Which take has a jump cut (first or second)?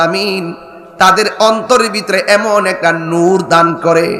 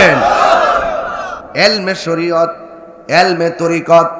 second